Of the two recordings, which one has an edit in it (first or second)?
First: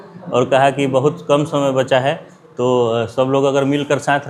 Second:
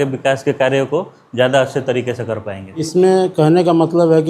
second